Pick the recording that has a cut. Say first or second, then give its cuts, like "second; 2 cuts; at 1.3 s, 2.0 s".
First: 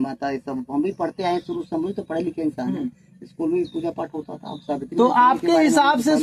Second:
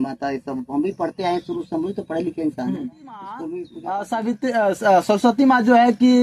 second; 1 cut; at 3.5 s